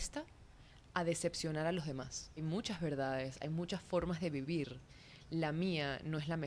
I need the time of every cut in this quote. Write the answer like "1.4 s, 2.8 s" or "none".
2.4 s